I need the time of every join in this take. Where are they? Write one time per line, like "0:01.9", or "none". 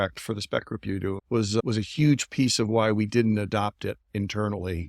0:01.6